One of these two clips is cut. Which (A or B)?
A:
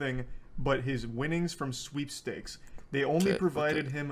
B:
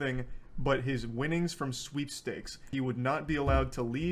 B